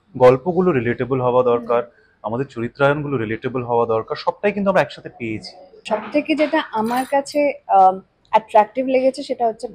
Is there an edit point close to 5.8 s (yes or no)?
yes